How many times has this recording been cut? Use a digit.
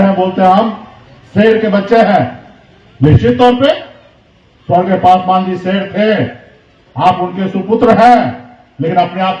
0